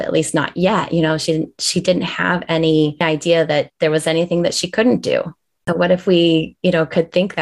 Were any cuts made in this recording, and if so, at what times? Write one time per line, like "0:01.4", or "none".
0:03.0
0:05.6